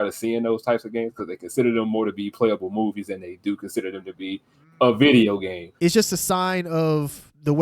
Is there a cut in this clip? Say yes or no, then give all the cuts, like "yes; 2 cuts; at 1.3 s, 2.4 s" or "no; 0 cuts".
yes; 1 cut; at 5.6 s